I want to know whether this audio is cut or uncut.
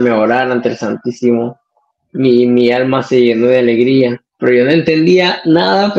cut